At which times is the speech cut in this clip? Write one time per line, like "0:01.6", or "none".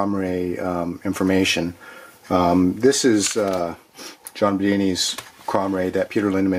0:05.3